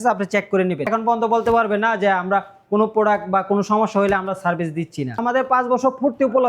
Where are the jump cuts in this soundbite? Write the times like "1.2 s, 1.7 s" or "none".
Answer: 0.9 s, 5.2 s